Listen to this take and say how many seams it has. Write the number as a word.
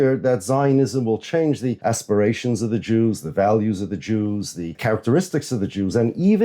two